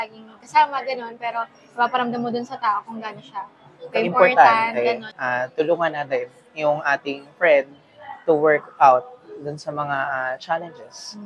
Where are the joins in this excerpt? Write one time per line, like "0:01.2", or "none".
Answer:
0:05.1